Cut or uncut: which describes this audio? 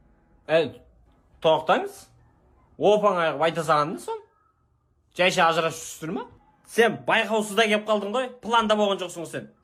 uncut